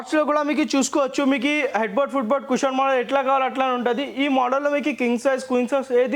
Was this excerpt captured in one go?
yes; 0 cuts

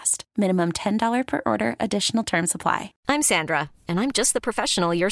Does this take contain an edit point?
yes; 1 cut; at 2.9 s

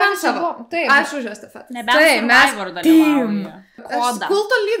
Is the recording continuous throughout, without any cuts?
no; 1 cut; at 3.8 s

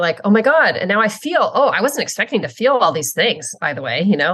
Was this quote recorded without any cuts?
yes; 0 cuts

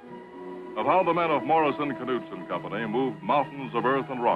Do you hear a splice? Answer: yes; 1 cut; at 1.5 s

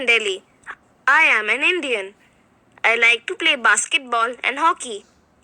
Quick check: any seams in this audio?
yes; 1 cut; at 3.9 s

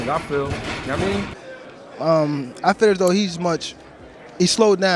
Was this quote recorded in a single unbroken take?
no; 1 cut; at 1.4 s

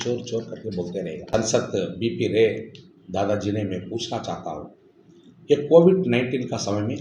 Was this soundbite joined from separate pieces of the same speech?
yes; 1 cut; at 1.3 s

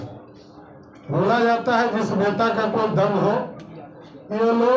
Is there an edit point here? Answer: no; 0 cuts

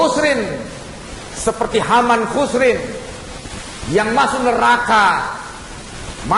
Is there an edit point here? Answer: no; 0 cuts

